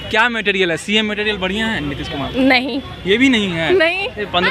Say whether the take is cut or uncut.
uncut